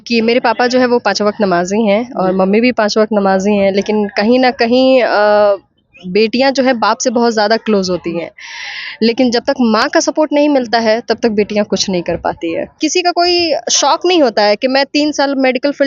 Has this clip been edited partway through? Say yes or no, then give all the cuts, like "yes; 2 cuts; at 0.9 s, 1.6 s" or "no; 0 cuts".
yes; 1 cut; at 12.7 s